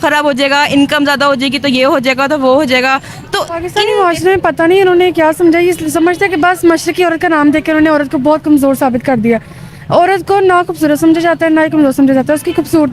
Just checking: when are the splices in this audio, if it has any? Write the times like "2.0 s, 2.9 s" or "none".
3.6 s